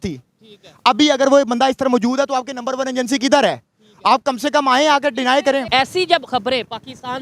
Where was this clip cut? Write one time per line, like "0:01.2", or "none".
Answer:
0:05.6